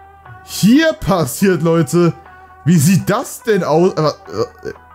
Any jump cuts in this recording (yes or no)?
no